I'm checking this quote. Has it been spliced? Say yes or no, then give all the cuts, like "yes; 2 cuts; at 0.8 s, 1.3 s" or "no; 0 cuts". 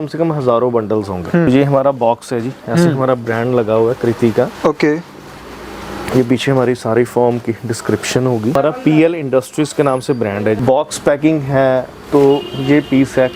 yes; 3 cuts; at 1.5 s, 8.6 s, 10.6 s